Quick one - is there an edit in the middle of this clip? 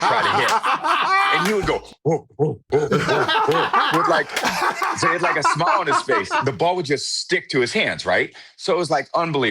yes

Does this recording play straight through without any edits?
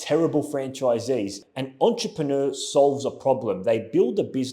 no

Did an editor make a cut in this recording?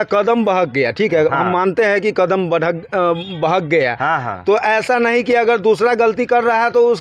no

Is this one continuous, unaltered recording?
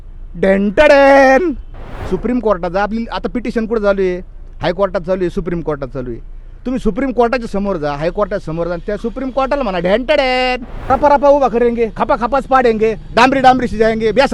no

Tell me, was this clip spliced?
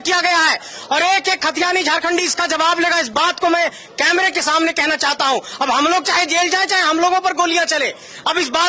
no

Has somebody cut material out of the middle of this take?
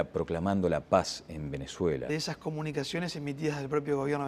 no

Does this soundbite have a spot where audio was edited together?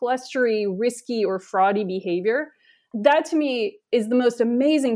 yes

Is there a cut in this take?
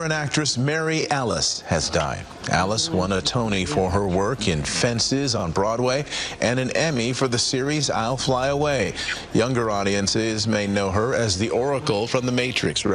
no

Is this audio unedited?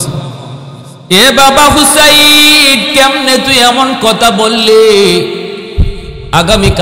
yes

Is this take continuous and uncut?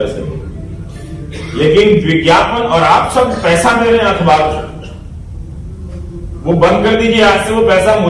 yes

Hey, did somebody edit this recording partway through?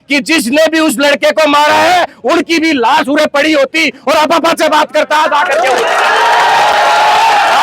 no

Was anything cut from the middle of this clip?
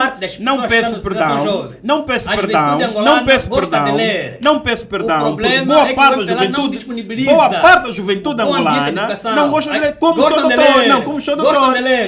no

